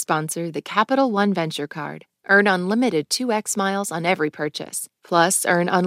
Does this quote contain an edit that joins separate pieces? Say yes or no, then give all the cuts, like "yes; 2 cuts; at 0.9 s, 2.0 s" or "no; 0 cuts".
no; 0 cuts